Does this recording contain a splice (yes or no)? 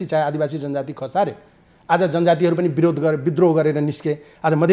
no